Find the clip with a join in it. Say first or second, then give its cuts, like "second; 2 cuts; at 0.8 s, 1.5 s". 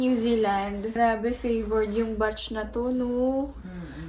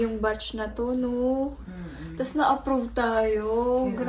first; 1 cut; at 0.9 s